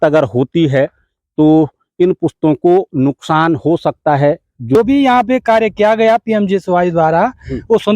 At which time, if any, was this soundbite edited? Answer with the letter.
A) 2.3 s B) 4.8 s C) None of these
B